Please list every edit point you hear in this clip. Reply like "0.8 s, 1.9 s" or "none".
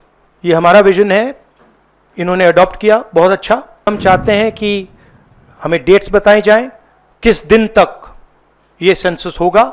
3.9 s

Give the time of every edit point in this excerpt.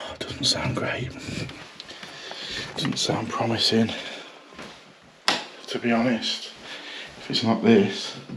none

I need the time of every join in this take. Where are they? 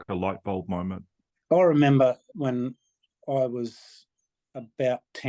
1.3 s, 2.3 s

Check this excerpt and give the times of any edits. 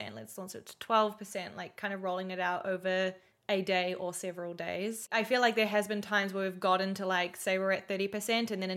5.0 s

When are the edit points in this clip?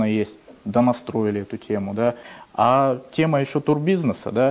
2.3 s

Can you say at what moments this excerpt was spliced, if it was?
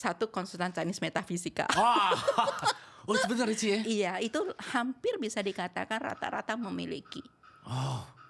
none

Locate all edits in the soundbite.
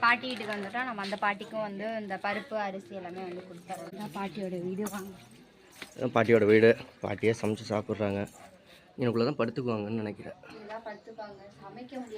3.9 s

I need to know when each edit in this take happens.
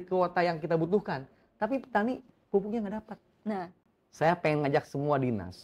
3.8 s

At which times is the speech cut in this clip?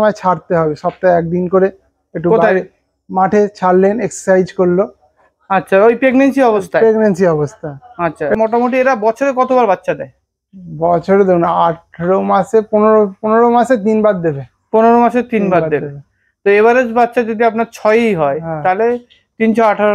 8.3 s

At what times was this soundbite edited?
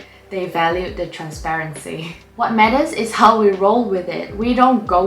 2.2 s

